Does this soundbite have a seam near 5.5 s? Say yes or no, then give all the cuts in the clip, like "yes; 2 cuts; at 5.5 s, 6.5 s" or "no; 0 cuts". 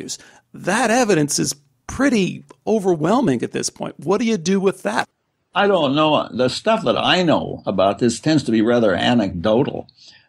yes; 1 cut; at 5.5 s